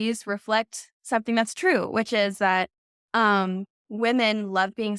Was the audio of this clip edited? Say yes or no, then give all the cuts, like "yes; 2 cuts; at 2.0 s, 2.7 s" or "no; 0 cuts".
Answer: no; 0 cuts